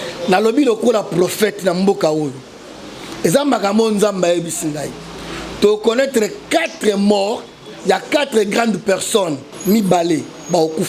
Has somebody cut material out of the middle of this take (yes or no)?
yes